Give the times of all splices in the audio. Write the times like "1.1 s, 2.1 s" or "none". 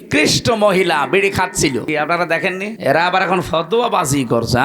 1.8 s, 2.8 s